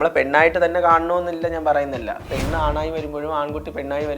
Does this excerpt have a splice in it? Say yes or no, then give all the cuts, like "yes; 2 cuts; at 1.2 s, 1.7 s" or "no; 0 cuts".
yes; 1 cut; at 2.3 s